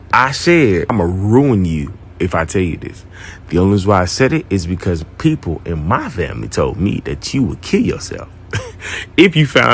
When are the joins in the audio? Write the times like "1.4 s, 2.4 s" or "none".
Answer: 0.9 s